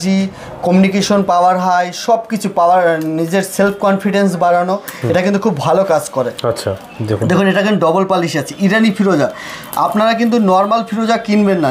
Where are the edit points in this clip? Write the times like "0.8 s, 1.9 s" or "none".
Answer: none